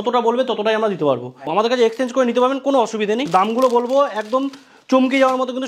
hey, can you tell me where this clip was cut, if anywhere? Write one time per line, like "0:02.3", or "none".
0:01.5
0:03.3